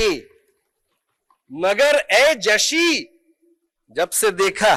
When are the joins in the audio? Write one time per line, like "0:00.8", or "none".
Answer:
none